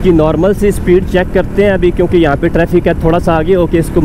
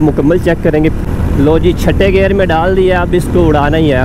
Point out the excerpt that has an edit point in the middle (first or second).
second